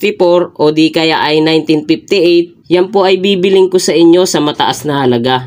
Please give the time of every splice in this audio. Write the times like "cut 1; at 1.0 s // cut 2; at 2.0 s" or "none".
cut 1; at 2.6 s